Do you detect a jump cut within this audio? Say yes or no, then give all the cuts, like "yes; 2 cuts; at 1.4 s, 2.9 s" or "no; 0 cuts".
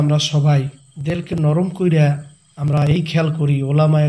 yes; 2 cuts; at 1.3 s, 2.4 s